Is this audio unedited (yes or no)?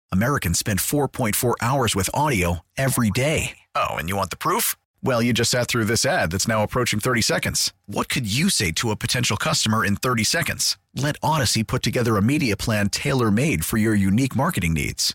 yes